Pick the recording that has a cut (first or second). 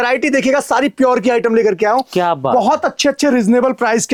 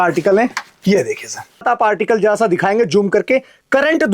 second